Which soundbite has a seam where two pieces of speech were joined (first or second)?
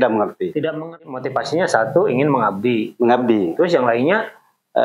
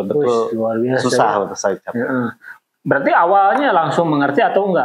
first